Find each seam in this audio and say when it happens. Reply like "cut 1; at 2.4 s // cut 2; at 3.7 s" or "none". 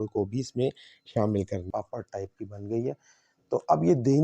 cut 1; at 1.7 s